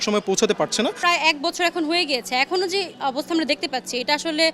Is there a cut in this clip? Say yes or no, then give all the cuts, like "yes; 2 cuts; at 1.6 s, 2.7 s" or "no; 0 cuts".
yes; 1 cut; at 1.0 s